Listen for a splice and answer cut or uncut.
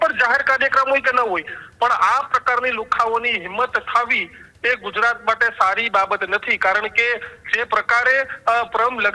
uncut